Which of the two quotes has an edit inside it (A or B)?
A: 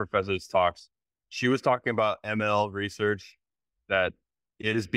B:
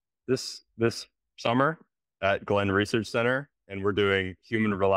A